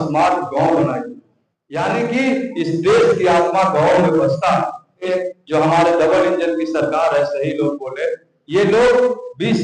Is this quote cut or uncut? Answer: cut